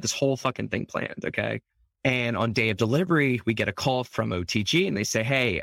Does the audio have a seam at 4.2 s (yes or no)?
no